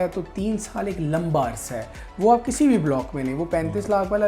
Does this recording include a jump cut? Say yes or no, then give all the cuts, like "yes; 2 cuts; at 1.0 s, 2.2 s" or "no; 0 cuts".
yes; 1 cut; at 2.0 s